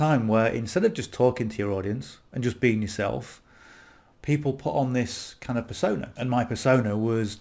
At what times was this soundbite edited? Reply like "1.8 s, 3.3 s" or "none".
6.1 s